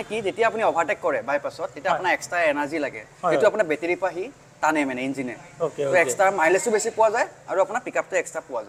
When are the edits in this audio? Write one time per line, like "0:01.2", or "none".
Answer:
none